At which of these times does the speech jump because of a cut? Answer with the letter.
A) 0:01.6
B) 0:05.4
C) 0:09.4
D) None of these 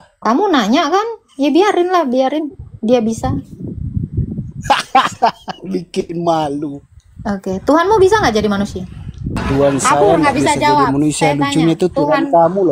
C